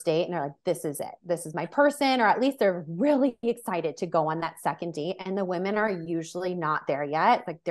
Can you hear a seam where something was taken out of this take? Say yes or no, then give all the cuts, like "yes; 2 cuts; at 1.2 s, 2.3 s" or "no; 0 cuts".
no; 0 cuts